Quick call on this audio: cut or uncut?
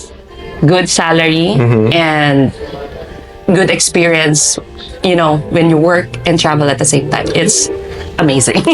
uncut